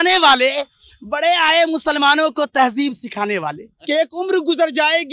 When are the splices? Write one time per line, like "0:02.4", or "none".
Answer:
0:03.7